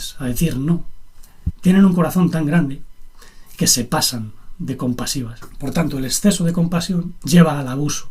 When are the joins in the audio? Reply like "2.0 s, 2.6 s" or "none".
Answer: 5.4 s, 7.2 s